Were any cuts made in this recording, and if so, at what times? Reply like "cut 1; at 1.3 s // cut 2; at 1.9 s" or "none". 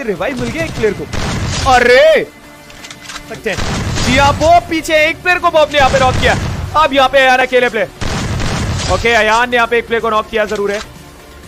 cut 1; at 3.3 s